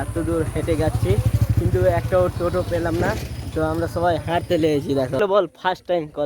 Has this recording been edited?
yes; 1 cut; at 5.3 s

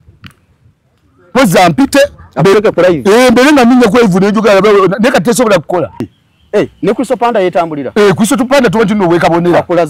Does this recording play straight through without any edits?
no; 1 cut; at 6.1 s

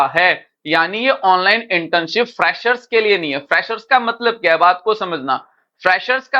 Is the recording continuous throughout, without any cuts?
yes; 0 cuts

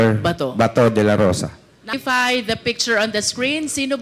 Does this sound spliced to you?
yes; 1 cut; at 1.9 s

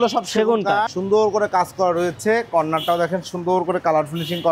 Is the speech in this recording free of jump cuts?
no; 1 cut; at 1.0 s

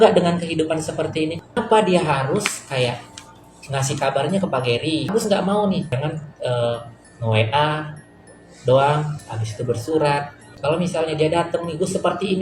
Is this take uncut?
no; 3 cuts; at 1.6 s, 5.1 s, 6.0 s

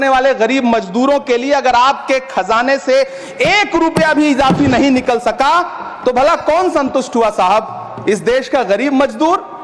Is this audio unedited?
yes; 0 cuts

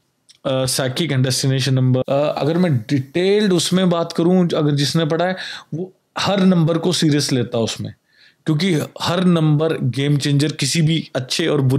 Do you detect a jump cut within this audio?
yes; 1 cut; at 2.0 s

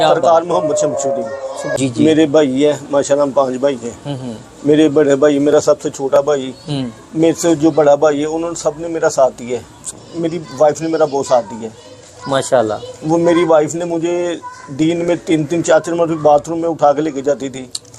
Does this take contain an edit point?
yes; 2 cuts; at 1.7 s, 9.9 s

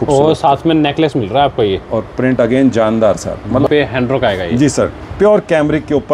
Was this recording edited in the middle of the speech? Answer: yes; 1 cut; at 3.7 s

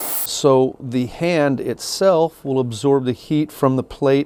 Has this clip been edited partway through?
no; 0 cuts

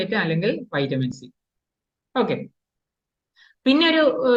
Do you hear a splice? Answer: no; 0 cuts

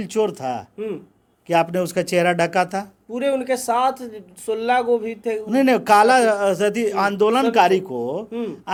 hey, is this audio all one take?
yes; 0 cuts

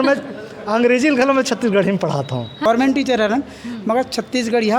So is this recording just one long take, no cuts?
no; 1 cut; at 2.6 s

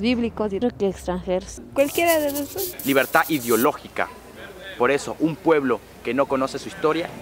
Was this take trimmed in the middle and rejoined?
yes; 1 cut; at 2.7 s

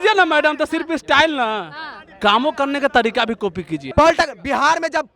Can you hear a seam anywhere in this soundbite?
yes; 1 cut; at 3.7 s

